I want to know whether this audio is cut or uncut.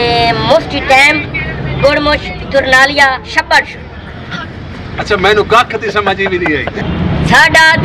cut